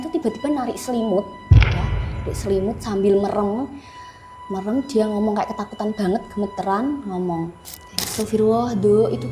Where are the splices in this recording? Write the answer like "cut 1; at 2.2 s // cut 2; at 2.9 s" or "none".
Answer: cut 1; at 8.0 s